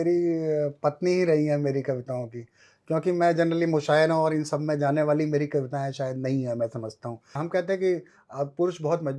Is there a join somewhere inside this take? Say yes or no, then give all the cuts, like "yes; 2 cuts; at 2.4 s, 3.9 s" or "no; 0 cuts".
yes; 1 cut; at 7.4 s